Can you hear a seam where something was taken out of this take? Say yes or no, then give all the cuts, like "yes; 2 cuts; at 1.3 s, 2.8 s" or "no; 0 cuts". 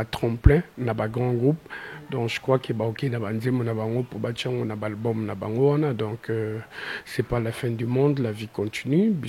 no; 0 cuts